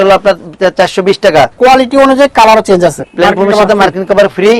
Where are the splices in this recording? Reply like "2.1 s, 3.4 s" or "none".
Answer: 1.5 s, 3.0 s